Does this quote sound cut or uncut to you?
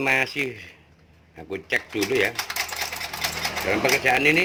uncut